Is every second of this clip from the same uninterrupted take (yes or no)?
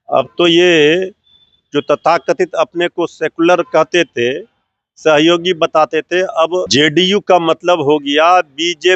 no